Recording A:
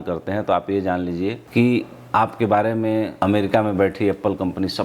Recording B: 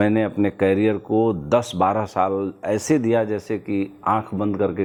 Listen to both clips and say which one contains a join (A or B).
A